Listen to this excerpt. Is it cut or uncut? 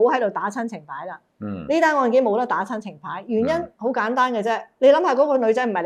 uncut